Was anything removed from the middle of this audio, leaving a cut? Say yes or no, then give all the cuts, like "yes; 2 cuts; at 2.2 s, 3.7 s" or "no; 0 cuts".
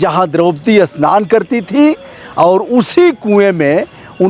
no; 0 cuts